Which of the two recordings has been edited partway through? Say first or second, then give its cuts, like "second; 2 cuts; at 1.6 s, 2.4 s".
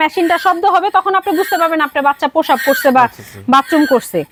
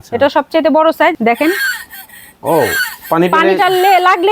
second; 1 cut; at 1.1 s